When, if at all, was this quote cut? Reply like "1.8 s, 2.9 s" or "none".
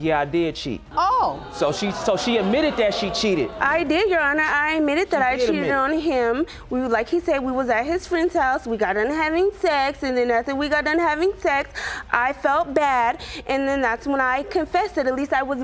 none